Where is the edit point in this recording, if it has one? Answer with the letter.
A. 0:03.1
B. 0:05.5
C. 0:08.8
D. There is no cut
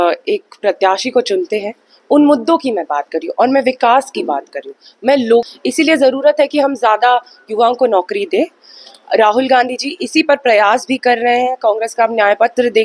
B